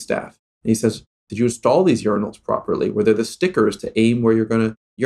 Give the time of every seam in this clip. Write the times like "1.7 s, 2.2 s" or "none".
none